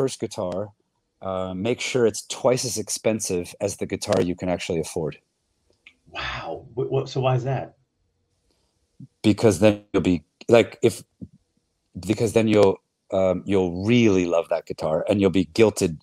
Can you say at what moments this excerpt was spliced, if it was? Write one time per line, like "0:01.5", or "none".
none